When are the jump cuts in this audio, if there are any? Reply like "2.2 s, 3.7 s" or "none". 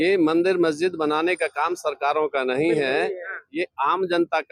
none